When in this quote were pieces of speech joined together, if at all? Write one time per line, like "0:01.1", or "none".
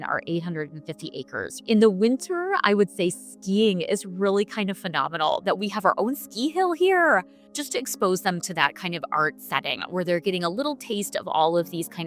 0:01.5
0:07.4